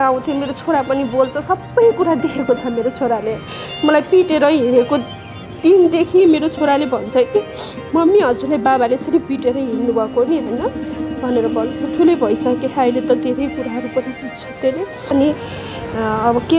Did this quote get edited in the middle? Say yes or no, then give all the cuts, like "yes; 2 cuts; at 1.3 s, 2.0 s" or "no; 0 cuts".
yes; 1 cut; at 15.1 s